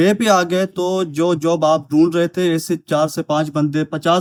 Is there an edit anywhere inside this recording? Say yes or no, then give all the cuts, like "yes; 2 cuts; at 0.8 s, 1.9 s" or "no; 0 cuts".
no; 0 cuts